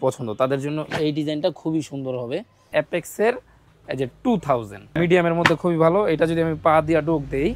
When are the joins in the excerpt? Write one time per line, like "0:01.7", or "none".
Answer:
0:02.7
0:04.9